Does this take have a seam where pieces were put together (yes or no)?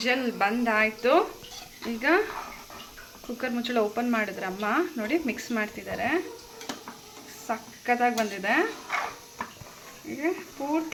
no